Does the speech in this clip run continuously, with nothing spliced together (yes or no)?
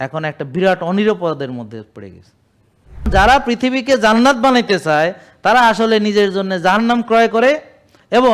no